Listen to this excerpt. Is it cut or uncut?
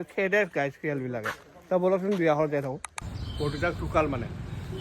cut